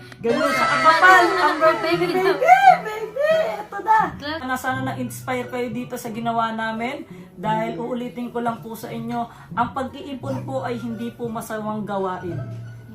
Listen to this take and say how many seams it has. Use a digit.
1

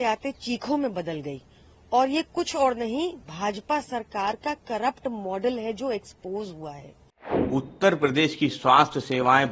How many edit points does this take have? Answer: 1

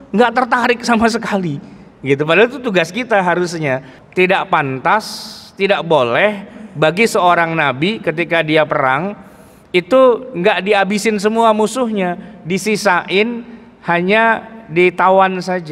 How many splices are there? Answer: 1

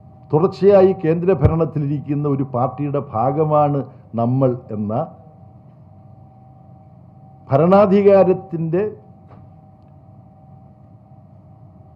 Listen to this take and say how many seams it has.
0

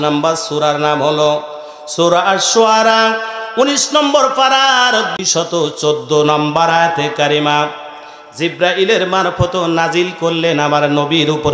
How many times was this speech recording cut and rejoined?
1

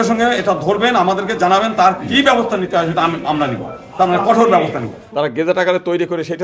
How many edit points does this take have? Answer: 1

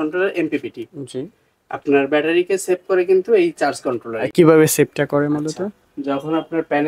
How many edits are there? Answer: 0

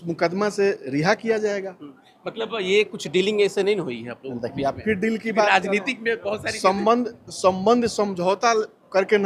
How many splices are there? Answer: 0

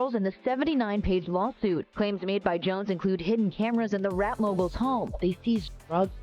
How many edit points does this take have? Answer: 1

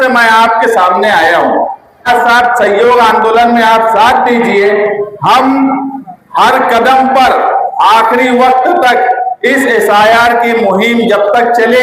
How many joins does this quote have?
1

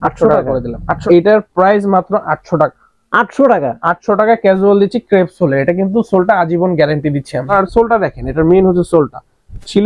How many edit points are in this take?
2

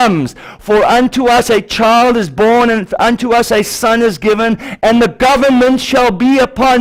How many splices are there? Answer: 0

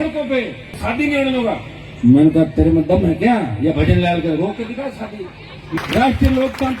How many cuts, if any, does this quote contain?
2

